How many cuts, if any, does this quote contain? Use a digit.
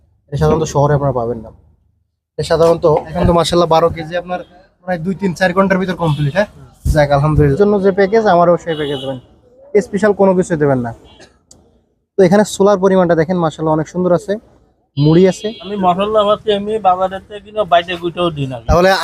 3